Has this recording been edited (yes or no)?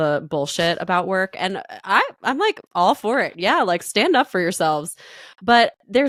no